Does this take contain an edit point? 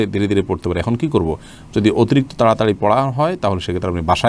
no; 0 cuts

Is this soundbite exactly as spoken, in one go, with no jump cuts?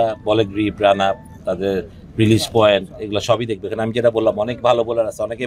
yes; 0 cuts

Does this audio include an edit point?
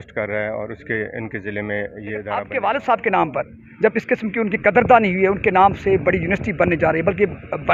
yes; 1 cut; at 2.5 s

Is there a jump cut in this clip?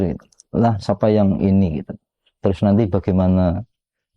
no; 0 cuts

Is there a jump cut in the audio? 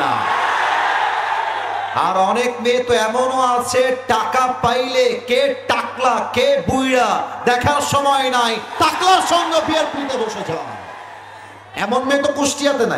no; 0 cuts

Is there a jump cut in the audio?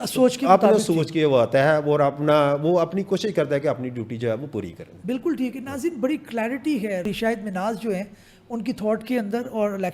no; 0 cuts

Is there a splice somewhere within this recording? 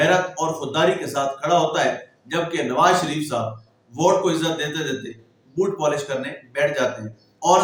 no; 0 cuts

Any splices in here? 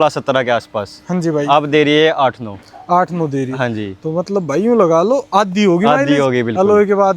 no; 0 cuts

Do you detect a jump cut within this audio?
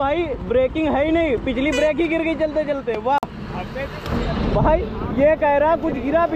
no; 0 cuts

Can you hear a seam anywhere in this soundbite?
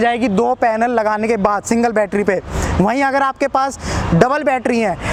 no; 0 cuts

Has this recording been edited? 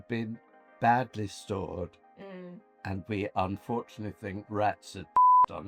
no; 0 cuts

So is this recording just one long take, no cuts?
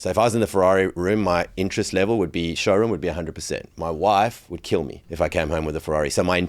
no; 1 cut; at 5.0 s

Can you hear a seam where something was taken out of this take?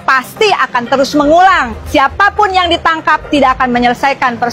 yes; 1 cut; at 1.7 s

